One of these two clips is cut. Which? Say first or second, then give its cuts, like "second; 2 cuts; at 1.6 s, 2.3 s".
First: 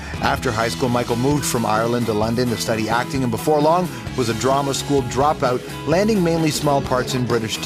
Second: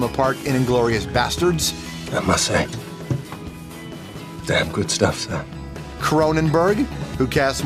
second; 1 cut; at 3.2 s